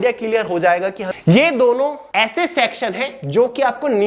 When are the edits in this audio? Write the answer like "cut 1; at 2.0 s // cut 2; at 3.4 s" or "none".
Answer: cut 1; at 1.0 s // cut 2; at 2.0 s